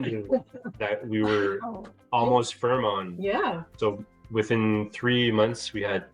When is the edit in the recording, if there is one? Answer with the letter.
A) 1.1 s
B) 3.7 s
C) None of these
B